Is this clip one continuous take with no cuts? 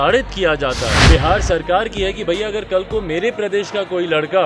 no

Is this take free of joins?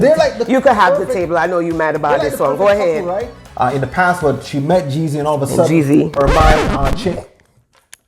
no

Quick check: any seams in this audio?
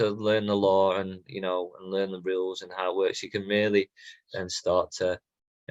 no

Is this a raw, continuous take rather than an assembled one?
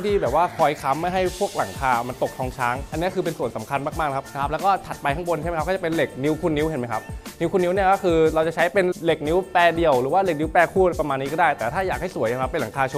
yes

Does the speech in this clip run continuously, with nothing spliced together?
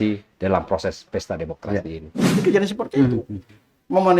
no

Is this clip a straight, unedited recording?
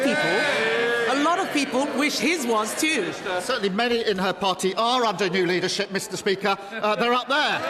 no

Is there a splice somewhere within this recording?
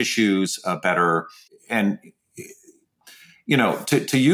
no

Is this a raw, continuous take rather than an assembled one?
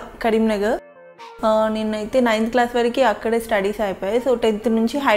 no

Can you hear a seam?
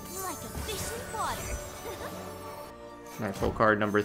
yes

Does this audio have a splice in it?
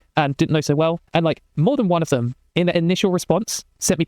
yes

